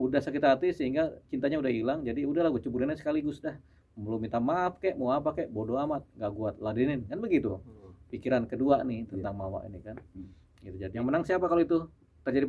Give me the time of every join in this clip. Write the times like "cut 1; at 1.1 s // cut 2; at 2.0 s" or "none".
cut 1; at 10.9 s